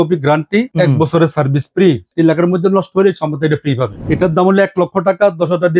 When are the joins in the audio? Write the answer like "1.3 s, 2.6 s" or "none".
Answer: 2.1 s, 3.9 s